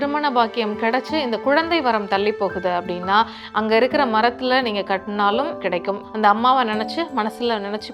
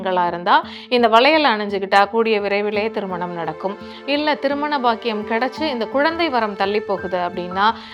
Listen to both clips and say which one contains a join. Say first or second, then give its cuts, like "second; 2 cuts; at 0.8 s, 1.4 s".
first; 1 cut; at 6.0 s